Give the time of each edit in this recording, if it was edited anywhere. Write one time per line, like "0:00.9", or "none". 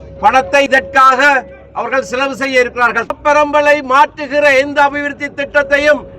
0:03.1